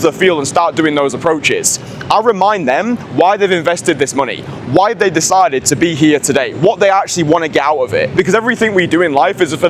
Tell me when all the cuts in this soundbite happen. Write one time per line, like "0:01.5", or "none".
0:08.1